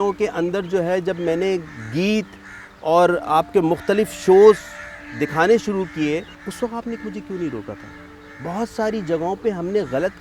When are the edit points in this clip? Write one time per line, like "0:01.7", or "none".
0:06.4

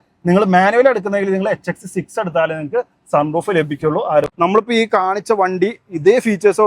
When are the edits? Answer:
0:04.3

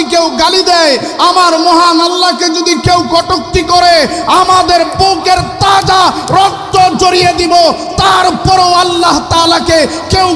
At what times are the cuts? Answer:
none

